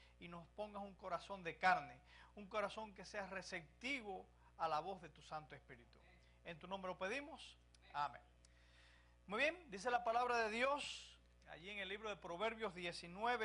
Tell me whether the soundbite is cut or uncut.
cut